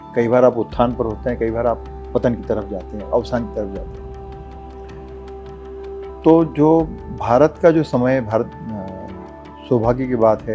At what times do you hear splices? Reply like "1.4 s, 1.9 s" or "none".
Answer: none